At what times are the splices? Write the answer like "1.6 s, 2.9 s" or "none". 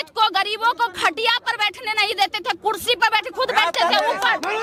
none